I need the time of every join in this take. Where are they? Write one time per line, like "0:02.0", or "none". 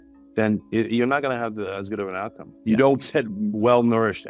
0:02.5
0:03.3